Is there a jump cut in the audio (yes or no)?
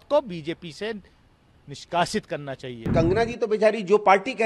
yes